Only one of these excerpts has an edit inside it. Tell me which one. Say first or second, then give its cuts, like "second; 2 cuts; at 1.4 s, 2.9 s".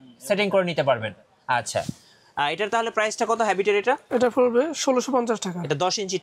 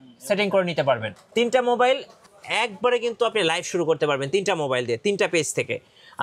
second; 1 cut; at 1.2 s